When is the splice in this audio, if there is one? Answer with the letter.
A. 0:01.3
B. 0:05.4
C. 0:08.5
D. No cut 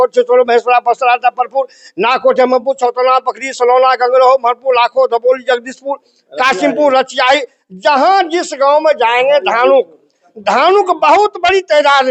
D